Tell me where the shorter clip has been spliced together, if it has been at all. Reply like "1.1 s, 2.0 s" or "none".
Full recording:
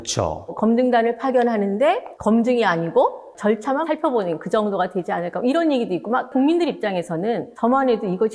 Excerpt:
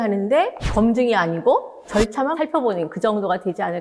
none